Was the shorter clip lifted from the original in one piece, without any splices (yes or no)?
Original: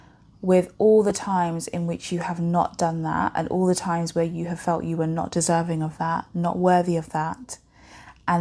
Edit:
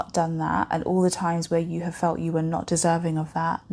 yes